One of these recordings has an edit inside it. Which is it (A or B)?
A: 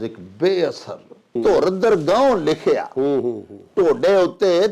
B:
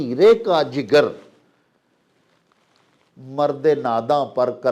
A